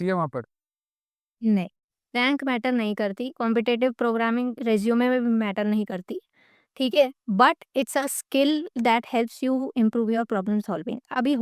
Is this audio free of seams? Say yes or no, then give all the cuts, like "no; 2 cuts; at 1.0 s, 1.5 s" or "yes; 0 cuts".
yes; 0 cuts